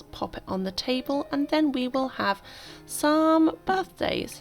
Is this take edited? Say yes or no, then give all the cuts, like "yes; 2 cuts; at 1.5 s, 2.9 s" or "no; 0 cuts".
no; 0 cuts